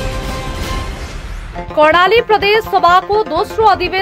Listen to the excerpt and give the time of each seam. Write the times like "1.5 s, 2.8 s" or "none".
1.2 s